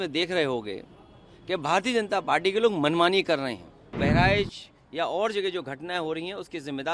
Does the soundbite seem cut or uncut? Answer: cut